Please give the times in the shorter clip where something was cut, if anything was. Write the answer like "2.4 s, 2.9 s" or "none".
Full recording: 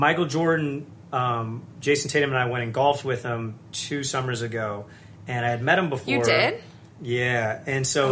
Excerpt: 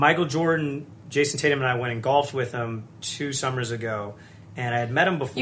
0.9 s